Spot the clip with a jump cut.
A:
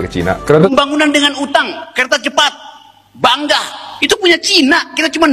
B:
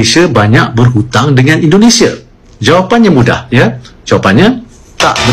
A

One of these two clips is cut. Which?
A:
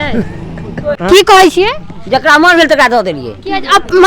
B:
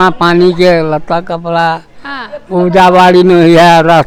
A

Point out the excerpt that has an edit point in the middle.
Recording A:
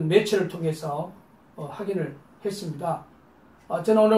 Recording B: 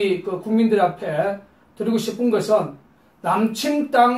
A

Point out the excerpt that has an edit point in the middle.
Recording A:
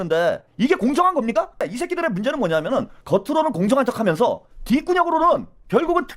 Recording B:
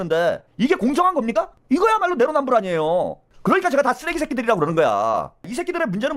A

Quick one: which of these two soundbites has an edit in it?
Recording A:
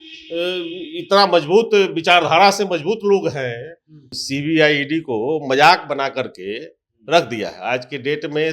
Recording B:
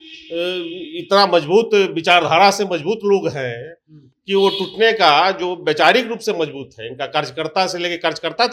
A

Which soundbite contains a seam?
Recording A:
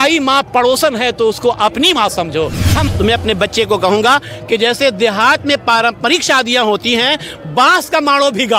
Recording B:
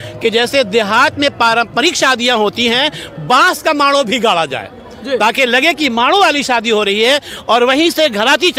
A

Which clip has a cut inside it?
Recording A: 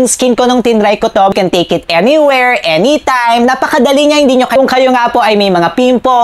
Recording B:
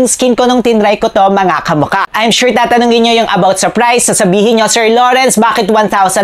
A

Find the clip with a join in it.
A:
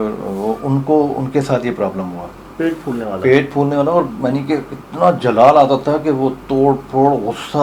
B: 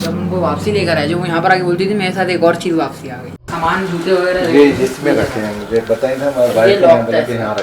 B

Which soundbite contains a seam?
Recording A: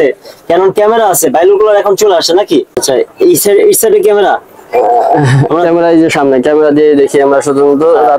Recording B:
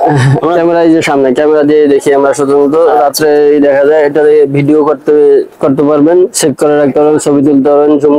A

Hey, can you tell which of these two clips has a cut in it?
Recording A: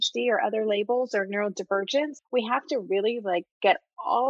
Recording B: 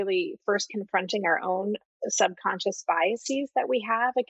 A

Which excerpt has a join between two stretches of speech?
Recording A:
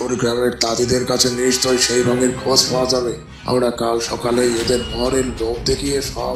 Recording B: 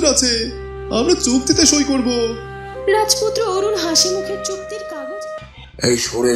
B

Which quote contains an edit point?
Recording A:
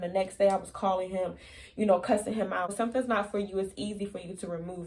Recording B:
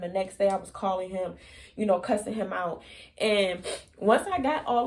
A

